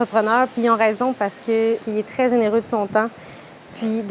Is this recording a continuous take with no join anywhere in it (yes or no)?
no